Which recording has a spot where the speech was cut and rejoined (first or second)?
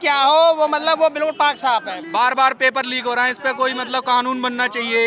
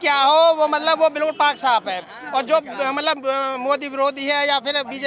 first